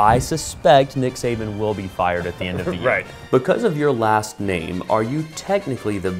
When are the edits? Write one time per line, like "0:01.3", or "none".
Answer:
0:03.2